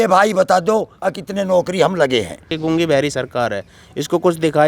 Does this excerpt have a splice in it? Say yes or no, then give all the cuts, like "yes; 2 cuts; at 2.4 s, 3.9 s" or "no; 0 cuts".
yes; 1 cut; at 2.5 s